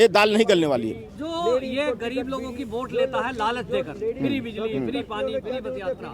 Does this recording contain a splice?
no; 0 cuts

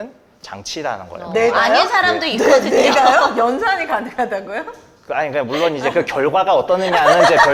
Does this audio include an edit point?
no; 0 cuts

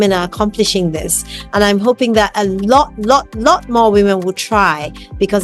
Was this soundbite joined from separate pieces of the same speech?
no; 0 cuts

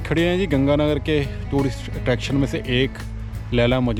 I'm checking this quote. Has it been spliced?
no; 0 cuts

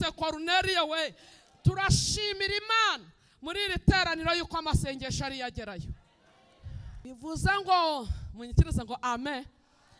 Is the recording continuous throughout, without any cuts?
no; 1 cut; at 6.9 s

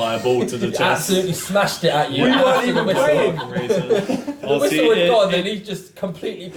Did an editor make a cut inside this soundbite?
no; 0 cuts

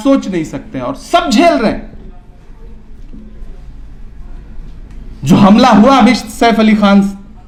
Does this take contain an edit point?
no; 0 cuts

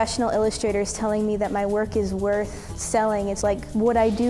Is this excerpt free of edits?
no; 1 cut; at 3.0 s

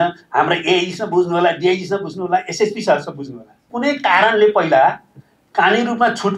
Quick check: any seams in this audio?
yes; 1 cut; at 3.6 s

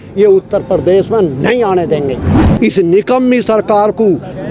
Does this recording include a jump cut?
yes; 1 cut; at 2.4 s

